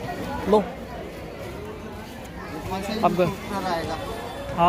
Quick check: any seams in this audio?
no; 0 cuts

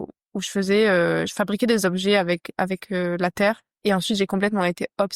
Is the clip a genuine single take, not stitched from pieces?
no; 1 cut; at 3.7 s

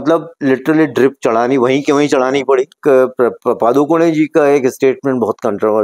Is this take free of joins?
no; 1 cut; at 2.8 s

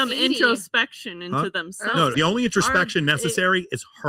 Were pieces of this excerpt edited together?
yes; 1 cut; at 2.1 s

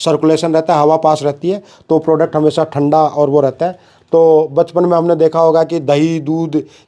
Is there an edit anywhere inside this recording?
no; 0 cuts

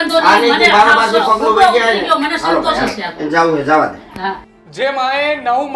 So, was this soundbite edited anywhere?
yes; 1 cut; at 4.5 s

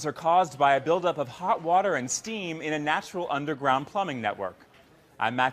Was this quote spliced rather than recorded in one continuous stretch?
yes; 1 cut; at 2.8 s

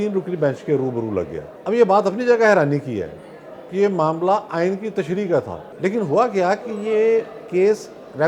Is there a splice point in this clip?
yes; 2 cuts; at 1.5 s, 5.6 s

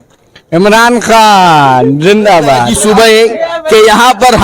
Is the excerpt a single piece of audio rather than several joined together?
no; 1 cut; at 2.6 s

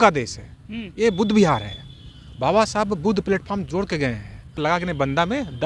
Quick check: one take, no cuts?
no; 1 cut; at 4.6 s

